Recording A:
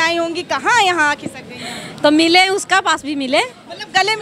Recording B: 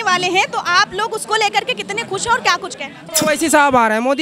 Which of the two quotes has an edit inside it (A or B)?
B